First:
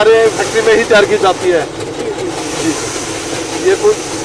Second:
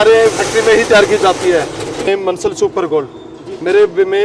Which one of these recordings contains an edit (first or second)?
second